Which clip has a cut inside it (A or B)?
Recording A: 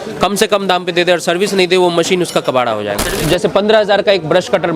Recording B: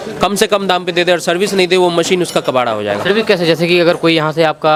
A